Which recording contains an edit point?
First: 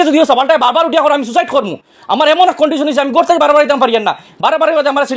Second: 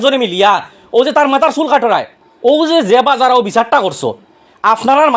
second; 1 cut; at 2.2 s

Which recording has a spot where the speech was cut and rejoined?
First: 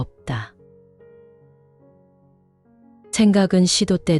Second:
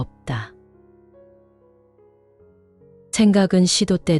second; 2 cuts; at 1.0 s, 2.7 s

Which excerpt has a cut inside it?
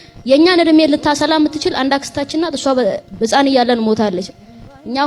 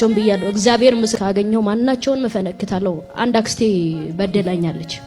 second; 1 cut; at 1.2 s

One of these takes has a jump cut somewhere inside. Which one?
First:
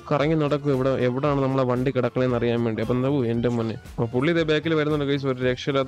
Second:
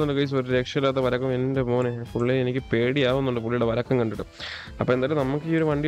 first; 1 cut; at 3.8 s

